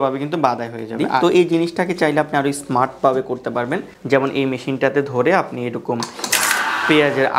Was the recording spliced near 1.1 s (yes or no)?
yes